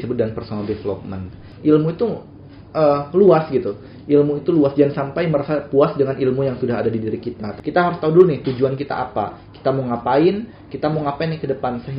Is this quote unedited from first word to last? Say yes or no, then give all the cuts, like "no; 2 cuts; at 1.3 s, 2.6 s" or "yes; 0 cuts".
no; 2 cuts; at 1.5 s, 7.5 s